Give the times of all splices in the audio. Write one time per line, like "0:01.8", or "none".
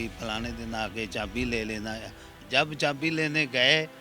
0:02.3